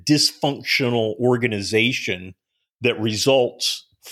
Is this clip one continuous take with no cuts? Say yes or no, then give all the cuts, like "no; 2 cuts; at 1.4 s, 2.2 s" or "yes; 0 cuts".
yes; 0 cuts